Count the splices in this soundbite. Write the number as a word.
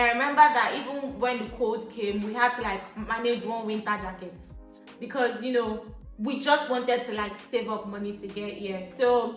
zero